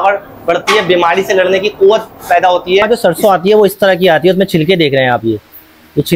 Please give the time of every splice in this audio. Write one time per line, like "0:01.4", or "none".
0:02.8